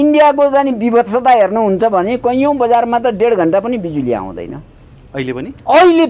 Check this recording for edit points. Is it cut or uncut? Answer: uncut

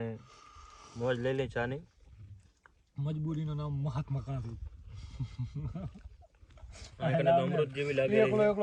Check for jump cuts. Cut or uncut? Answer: uncut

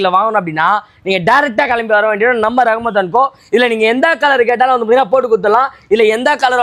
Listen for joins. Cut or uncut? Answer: uncut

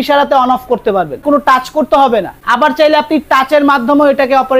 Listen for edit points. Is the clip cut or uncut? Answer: cut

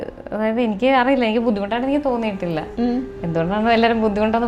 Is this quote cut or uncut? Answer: uncut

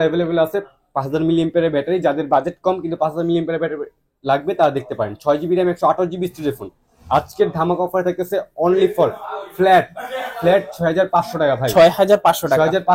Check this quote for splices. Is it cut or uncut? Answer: uncut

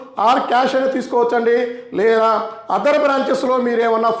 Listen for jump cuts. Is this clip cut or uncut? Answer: uncut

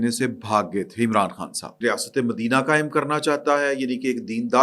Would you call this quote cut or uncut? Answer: cut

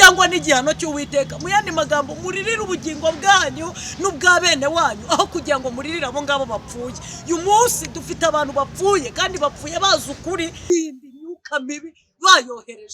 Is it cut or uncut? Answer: cut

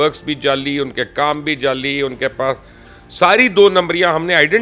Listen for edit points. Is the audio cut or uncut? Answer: uncut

